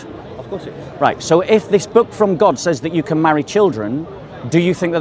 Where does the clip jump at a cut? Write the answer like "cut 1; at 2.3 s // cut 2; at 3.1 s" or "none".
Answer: none